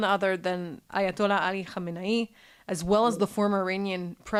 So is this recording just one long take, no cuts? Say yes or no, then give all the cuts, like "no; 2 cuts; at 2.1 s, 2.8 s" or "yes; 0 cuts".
yes; 0 cuts